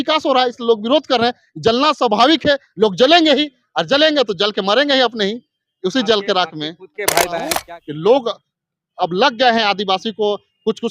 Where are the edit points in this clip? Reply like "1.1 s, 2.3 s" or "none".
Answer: 7.6 s